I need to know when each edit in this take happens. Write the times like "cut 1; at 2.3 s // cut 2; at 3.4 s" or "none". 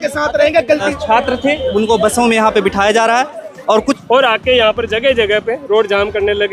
cut 1; at 0.9 s // cut 2; at 4.0 s